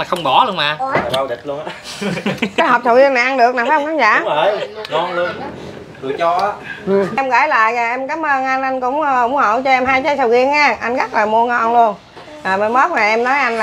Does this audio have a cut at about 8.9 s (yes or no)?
no